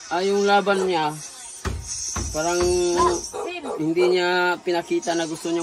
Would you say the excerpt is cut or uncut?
uncut